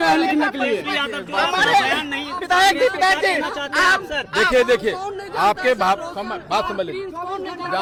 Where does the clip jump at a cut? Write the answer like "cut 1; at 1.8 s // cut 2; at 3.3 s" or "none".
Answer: none